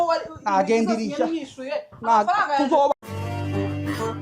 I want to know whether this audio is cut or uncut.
cut